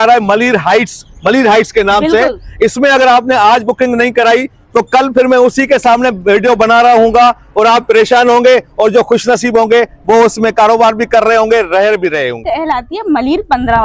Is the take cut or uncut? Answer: cut